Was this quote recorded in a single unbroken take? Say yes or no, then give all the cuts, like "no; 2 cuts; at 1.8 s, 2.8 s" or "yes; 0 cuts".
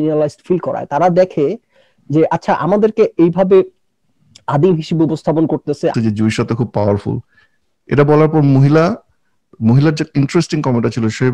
no; 1 cut; at 5.9 s